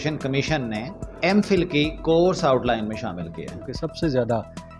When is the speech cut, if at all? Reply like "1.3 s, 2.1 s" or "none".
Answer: 1.0 s, 3.7 s

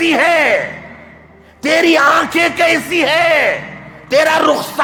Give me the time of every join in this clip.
none

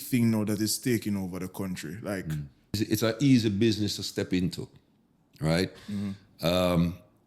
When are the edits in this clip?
2.8 s

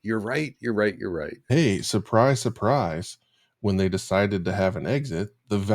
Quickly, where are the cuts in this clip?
1.4 s

